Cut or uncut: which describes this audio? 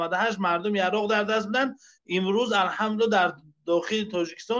uncut